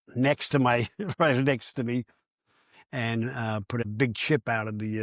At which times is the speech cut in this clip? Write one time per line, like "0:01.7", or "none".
0:03.8